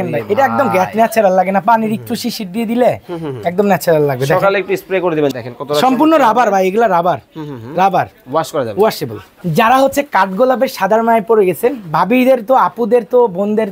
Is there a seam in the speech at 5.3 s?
yes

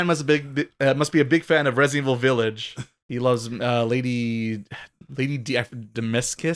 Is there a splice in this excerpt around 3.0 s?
no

